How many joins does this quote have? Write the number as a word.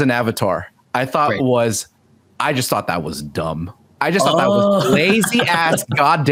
zero